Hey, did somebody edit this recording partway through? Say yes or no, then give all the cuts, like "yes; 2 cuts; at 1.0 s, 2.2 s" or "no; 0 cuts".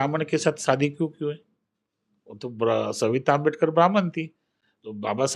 no; 0 cuts